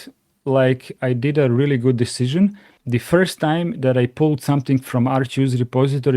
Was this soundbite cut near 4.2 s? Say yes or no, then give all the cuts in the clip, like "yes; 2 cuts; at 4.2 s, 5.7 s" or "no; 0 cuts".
no; 1 cut; at 2.7 s